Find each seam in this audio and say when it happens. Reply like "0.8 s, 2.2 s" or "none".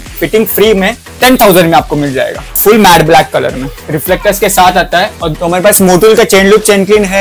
2.4 s, 5.3 s